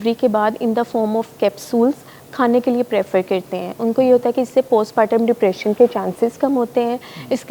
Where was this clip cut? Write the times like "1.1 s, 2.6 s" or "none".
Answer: none